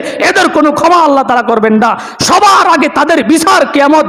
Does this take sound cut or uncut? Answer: uncut